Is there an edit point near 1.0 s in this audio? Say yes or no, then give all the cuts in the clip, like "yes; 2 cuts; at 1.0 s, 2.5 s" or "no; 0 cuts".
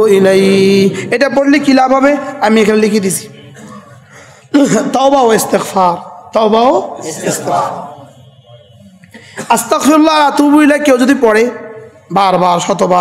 no; 0 cuts